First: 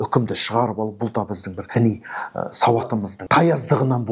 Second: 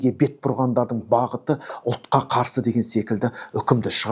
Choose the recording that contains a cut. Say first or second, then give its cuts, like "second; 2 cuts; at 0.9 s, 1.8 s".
first; 2 cuts; at 1.6 s, 3.2 s